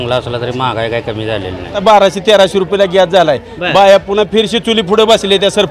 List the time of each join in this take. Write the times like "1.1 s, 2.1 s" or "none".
1.8 s